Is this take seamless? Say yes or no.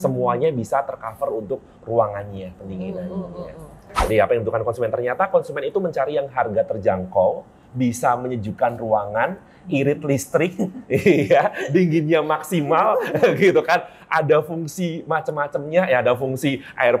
no